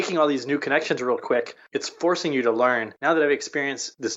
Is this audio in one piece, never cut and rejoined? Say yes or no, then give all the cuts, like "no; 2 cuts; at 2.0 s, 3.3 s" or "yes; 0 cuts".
no; 2 cuts; at 1.6 s, 2.9 s